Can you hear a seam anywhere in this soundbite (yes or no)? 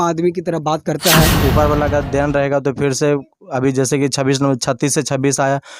yes